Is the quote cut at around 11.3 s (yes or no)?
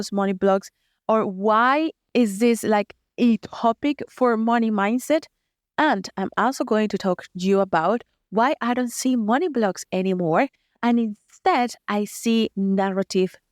no